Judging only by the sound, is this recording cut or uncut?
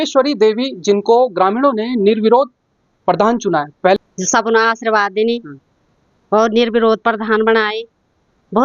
cut